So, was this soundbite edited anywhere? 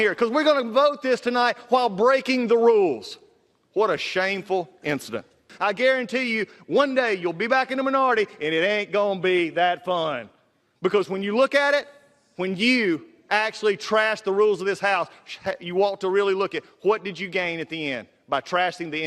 yes; 1 cut; at 5.5 s

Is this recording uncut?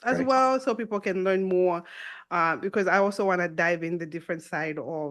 yes; 0 cuts

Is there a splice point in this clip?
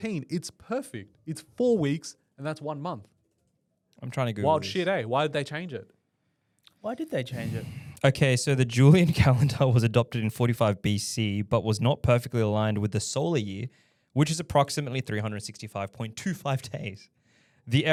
no; 0 cuts

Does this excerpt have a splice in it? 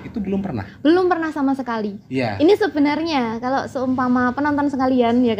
yes; 1 cut; at 2.0 s

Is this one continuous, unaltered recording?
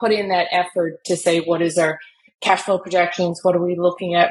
yes; 0 cuts

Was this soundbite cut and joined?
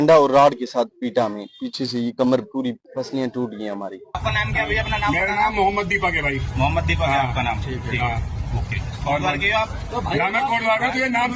yes; 2 cuts; at 2.8 s, 4.2 s

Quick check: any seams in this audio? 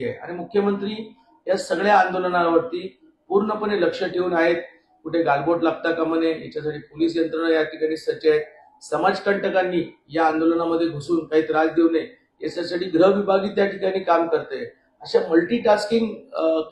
no; 0 cuts

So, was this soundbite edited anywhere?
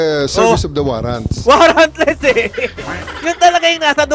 no; 0 cuts

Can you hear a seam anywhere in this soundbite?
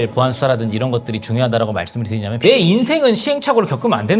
no; 0 cuts

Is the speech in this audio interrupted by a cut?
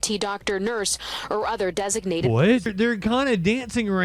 yes; 1 cut; at 2.7 s

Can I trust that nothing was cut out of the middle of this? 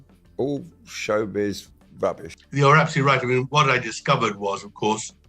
no; 1 cut; at 2.0 s

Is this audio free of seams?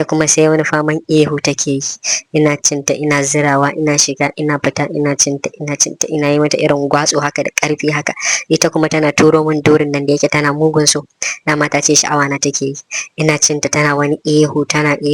yes; 0 cuts

